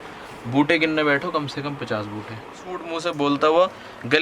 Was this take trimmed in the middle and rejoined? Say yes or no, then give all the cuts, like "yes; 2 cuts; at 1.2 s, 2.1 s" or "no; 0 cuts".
yes; 1 cut; at 3.0 s